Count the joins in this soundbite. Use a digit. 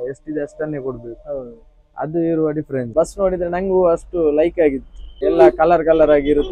2